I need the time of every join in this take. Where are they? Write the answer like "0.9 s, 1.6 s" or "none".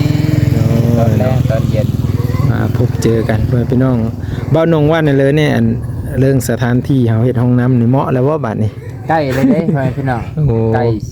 none